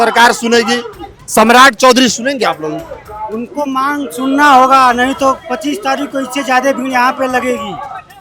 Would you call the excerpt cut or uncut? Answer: uncut